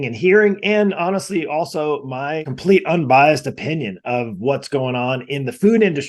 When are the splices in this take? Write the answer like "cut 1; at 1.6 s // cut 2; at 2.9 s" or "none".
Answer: cut 1; at 2.5 s